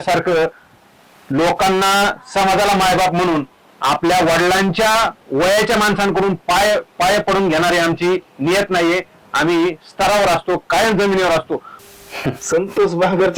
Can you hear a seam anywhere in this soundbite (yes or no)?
yes